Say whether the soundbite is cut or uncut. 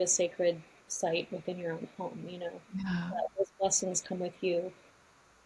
uncut